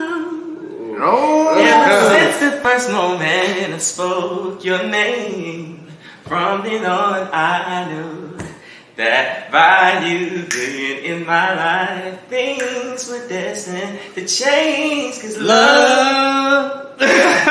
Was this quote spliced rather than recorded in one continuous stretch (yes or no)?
no